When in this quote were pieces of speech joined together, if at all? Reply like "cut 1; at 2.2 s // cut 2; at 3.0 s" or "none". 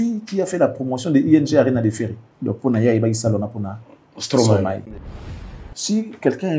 cut 1; at 2.3 s // cut 2; at 5.3 s